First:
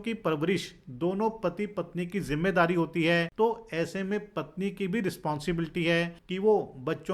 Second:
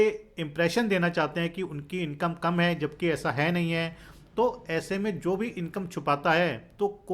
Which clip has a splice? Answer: first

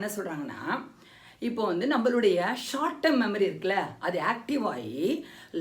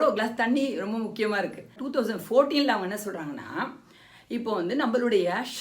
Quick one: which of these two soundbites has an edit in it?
second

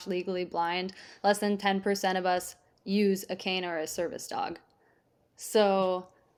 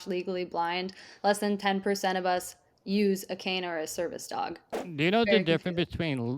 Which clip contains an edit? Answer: second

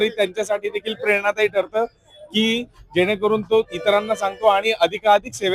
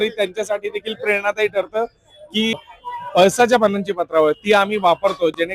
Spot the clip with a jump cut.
second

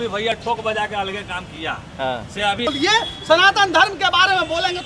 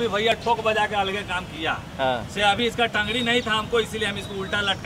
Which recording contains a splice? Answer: first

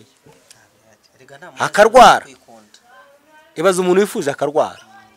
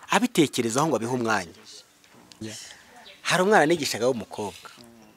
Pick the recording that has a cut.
second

